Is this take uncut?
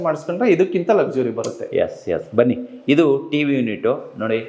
yes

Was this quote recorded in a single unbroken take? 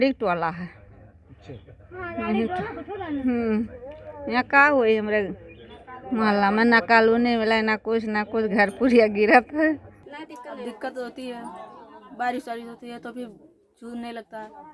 no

